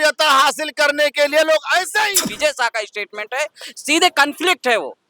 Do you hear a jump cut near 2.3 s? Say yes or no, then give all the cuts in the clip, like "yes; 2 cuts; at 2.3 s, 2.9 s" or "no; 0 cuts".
yes; 1 cut; at 2.3 s